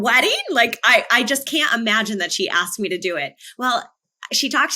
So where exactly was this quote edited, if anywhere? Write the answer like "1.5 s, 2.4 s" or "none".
none